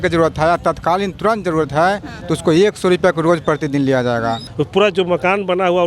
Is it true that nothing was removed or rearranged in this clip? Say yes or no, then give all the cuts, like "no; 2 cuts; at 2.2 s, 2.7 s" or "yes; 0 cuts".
no; 1 cut; at 4.5 s